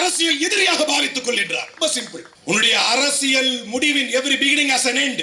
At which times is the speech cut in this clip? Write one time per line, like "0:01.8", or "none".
0:01.8

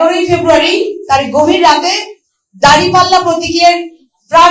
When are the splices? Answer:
none

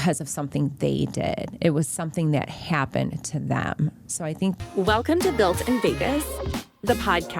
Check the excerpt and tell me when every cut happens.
0:04.6

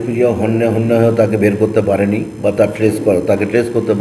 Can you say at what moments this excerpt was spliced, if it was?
none

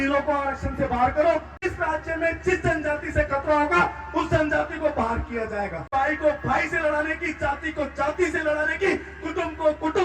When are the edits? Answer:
0:01.6
0:05.9

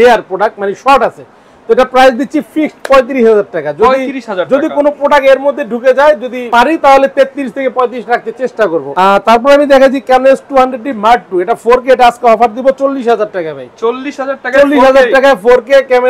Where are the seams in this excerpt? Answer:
none

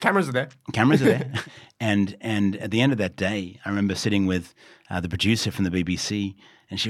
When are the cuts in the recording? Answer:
0:01.3

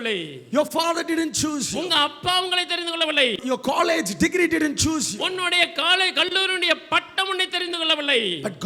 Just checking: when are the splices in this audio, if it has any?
none

